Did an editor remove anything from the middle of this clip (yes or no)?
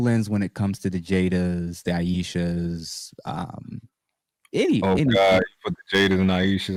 no